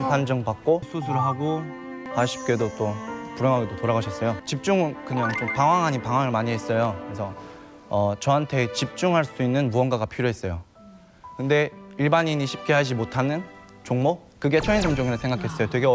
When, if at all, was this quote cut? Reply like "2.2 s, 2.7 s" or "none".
0.9 s, 2.1 s, 4.4 s